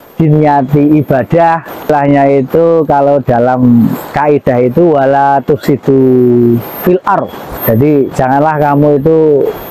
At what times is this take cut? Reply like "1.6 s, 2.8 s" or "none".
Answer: 1.9 s, 7.5 s